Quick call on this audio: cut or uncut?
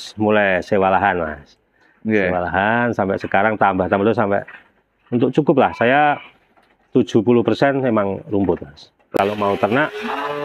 cut